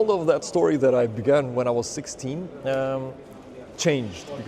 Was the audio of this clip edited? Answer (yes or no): no